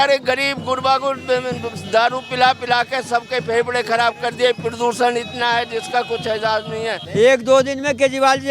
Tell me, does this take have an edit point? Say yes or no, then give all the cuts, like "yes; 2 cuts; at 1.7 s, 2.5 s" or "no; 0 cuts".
yes; 1 cut; at 7.0 s